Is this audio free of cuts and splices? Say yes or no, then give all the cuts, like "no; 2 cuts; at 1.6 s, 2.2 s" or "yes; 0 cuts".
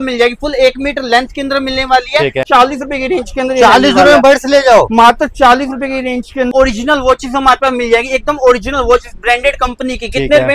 no; 2 cuts; at 2.4 s, 6.5 s